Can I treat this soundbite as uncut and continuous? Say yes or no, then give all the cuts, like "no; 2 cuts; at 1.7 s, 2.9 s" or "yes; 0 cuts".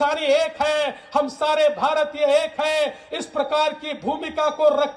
yes; 0 cuts